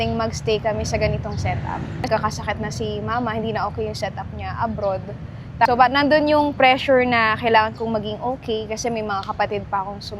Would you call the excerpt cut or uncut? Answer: cut